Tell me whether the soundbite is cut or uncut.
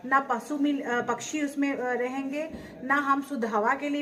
uncut